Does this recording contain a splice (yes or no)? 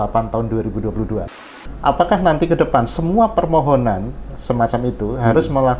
yes